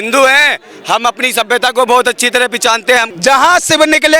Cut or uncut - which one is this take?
cut